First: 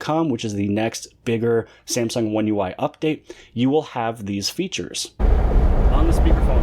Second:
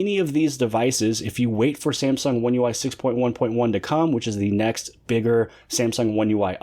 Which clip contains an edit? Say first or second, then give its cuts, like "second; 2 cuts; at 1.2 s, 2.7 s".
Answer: first; 1 cut; at 5.2 s